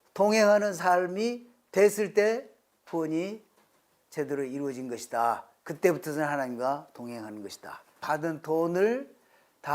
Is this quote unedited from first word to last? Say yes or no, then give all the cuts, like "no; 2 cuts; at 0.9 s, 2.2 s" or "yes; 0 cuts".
no; 1 cut; at 8.0 s